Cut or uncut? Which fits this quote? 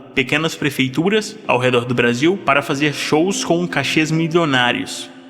cut